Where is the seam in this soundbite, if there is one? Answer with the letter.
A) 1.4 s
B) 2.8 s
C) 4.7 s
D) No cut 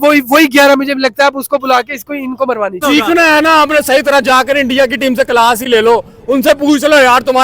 B